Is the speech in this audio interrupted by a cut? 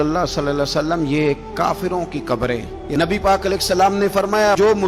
yes; 1 cut; at 2.8 s

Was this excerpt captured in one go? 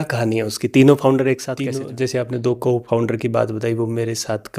no; 1 cut; at 1.8 s

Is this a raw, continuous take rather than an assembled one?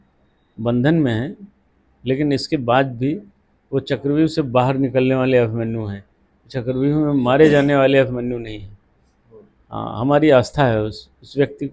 yes; 0 cuts

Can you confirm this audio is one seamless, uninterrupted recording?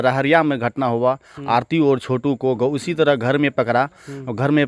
yes; 0 cuts

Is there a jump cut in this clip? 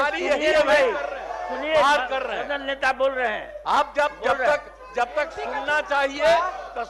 no; 0 cuts

